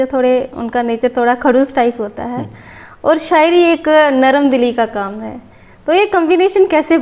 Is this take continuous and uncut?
yes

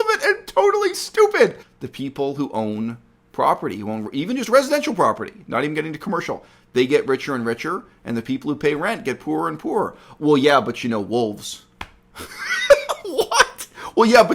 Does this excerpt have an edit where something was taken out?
yes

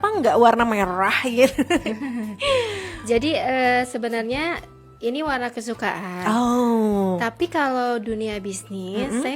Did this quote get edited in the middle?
no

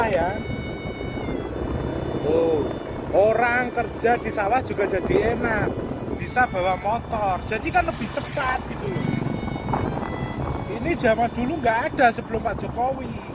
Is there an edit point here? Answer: no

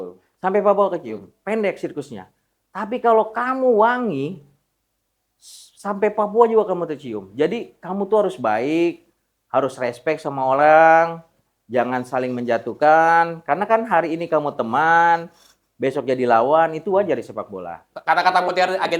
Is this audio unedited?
no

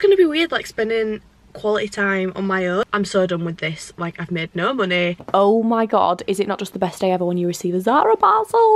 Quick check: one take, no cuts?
no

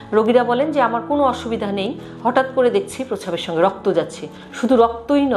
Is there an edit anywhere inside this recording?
no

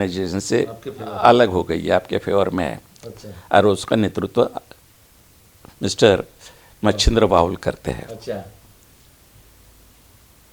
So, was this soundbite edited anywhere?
no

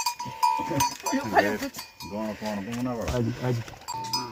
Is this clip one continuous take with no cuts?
yes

